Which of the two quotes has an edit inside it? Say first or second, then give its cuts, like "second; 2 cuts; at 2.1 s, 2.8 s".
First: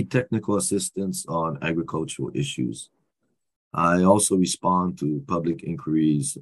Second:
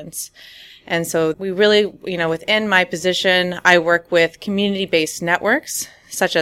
second; 1 cut; at 1.3 s